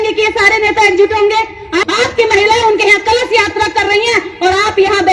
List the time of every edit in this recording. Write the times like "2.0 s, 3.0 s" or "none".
1.9 s